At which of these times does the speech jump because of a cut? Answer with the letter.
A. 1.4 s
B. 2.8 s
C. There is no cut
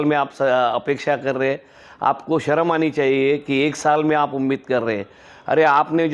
C